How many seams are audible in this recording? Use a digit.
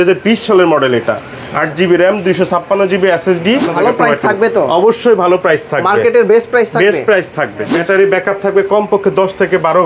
2